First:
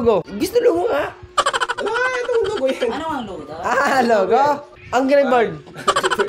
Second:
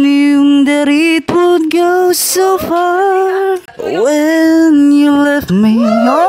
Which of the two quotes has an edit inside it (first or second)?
first